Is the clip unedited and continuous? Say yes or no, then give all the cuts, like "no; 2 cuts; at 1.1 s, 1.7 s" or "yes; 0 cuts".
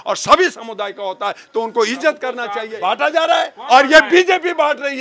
no; 1 cut; at 2.7 s